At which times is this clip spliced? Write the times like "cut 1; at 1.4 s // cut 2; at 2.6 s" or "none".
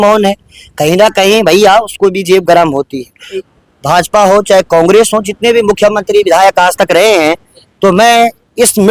cut 1; at 3.5 s